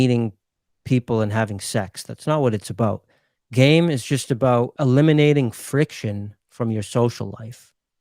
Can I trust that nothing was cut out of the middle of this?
no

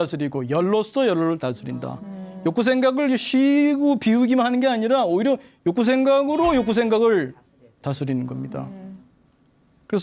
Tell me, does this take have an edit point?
no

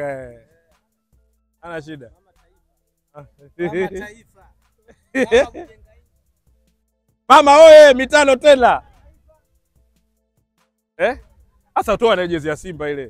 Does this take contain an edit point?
no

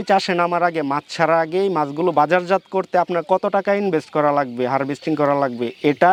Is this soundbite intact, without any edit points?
yes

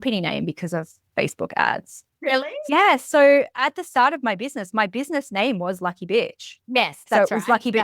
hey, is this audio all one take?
no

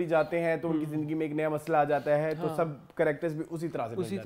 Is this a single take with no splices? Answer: yes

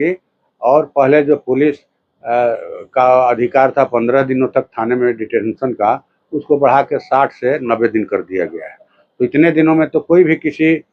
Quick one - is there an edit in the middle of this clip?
no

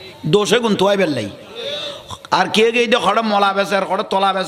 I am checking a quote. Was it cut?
no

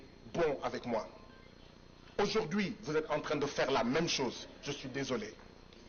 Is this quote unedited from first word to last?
yes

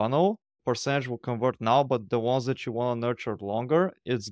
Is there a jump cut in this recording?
no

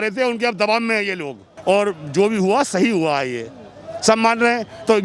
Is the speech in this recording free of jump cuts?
no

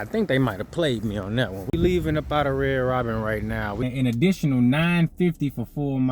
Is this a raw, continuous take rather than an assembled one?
no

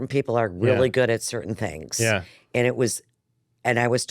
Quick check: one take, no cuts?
yes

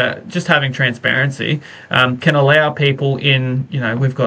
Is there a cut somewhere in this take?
no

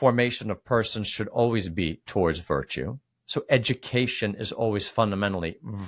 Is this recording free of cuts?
yes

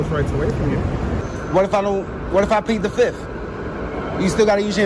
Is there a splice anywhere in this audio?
yes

